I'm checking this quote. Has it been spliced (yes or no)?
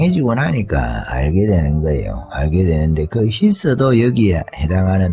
no